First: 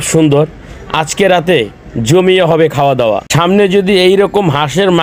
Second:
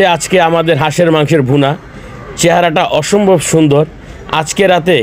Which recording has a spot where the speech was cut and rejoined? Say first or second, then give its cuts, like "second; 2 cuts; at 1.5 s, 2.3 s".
first; 1 cut; at 3.3 s